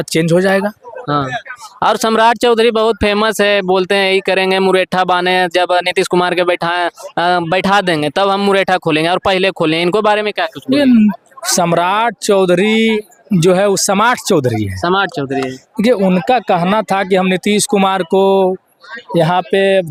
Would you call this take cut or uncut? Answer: uncut